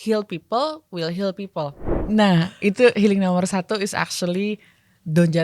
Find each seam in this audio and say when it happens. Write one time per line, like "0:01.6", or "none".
0:01.9